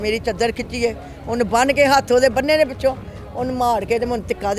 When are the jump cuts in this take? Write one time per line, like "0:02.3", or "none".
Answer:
none